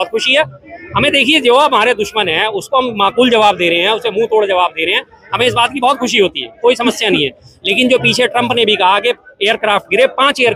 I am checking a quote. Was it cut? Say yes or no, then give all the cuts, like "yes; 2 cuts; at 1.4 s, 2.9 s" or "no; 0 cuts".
no; 0 cuts